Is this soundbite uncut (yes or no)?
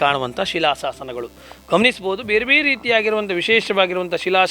yes